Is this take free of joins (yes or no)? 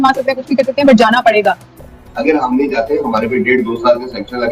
no